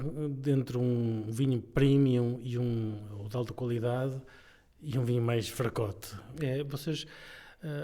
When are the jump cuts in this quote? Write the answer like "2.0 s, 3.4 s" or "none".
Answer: 6.3 s

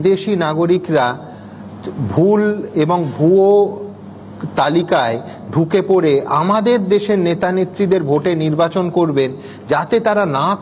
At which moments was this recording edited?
none

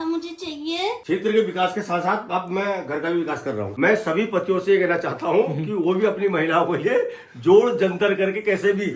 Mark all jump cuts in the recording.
1.0 s, 3.7 s

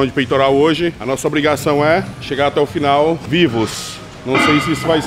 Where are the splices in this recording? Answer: 1.0 s, 2.2 s, 3.2 s

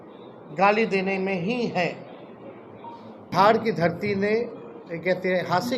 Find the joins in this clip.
3.3 s

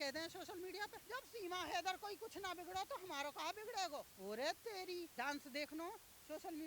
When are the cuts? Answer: 1.0 s, 4.1 s, 5.1 s

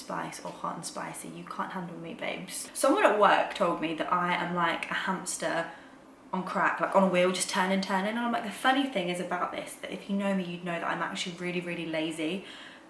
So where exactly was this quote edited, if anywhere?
2.6 s

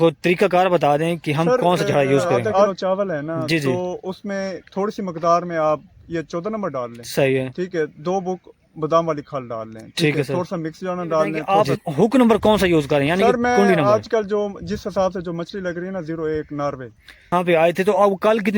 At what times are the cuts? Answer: 2.7 s, 11.4 s, 17.3 s

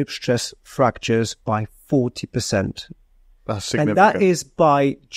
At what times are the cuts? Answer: none

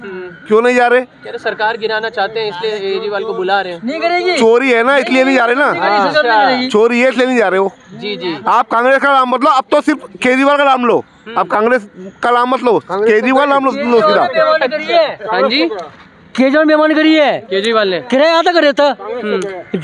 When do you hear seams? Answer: none

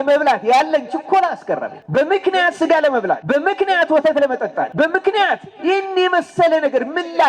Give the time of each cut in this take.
1.8 s, 3.2 s, 4.7 s

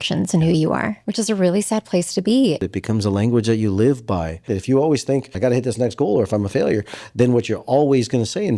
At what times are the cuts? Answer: 1.0 s, 2.6 s, 4.5 s, 5.3 s

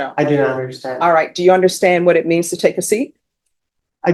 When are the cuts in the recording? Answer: none

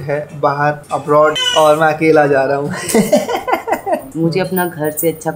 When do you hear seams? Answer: 4.0 s

